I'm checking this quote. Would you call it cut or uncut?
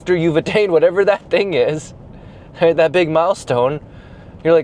uncut